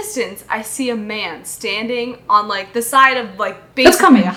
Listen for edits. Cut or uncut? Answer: uncut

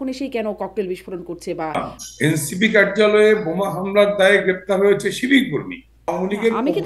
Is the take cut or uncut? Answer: cut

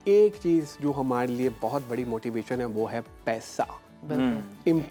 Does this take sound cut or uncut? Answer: uncut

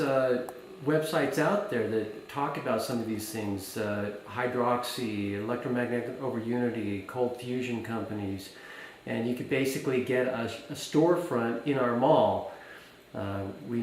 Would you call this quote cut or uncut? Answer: uncut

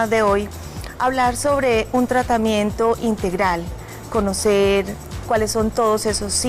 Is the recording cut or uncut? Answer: cut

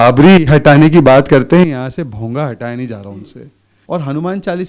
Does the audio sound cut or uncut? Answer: cut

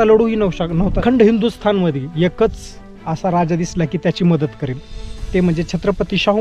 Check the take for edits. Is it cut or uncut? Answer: cut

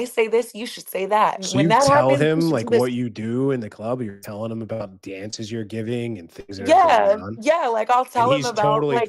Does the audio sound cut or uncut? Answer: cut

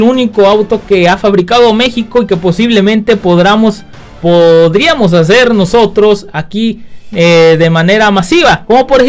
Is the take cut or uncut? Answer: uncut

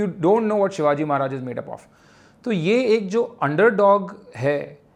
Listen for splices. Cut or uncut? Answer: uncut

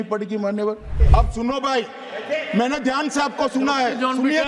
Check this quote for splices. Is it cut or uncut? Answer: cut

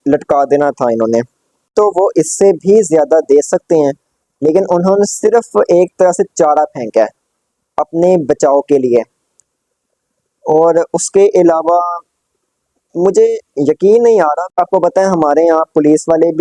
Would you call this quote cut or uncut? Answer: cut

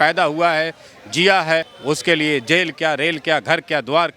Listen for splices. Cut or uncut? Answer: cut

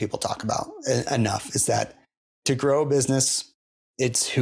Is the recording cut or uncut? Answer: uncut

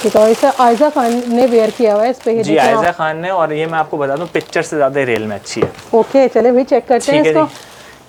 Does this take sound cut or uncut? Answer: uncut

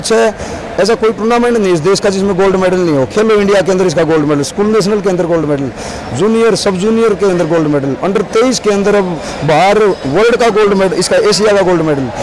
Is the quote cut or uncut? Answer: uncut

